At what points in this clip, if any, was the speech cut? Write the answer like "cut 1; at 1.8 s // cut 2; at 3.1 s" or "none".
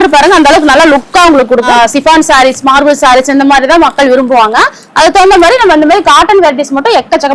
cut 1; at 1.7 s